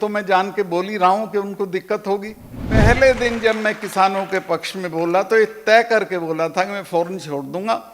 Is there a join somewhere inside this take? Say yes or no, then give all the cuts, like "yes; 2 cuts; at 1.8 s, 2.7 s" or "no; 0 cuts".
yes; 1 cut; at 2.8 s